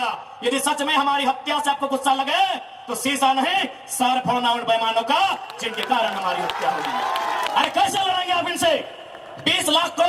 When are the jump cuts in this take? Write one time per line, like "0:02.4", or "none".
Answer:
0:07.5